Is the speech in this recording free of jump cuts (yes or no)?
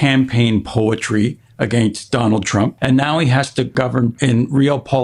no